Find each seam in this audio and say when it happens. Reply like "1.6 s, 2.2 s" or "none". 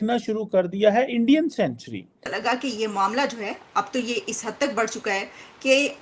2.3 s